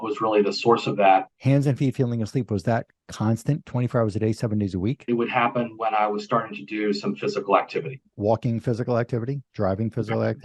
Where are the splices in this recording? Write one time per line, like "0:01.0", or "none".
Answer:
0:01.3
0:05.0
0:08.1